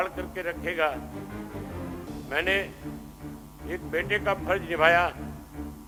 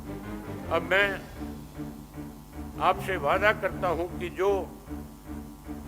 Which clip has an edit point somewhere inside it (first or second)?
second